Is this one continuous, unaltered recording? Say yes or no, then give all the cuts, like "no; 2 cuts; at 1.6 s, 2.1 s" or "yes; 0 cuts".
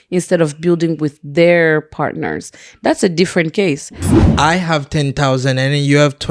no; 1 cut; at 4.0 s